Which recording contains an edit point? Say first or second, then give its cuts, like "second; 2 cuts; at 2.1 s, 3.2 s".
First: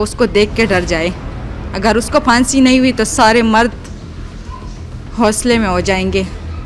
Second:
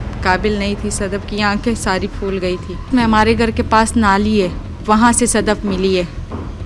second; 1 cut; at 2.9 s